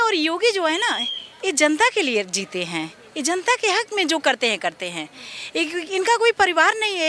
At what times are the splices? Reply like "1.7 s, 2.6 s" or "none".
none